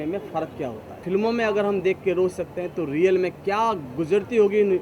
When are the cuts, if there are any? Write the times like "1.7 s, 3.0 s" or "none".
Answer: 1.0 s